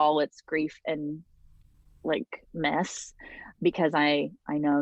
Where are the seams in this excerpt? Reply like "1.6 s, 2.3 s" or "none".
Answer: none